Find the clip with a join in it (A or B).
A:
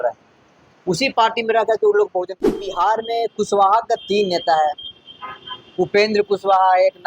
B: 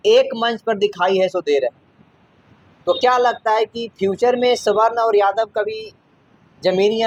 A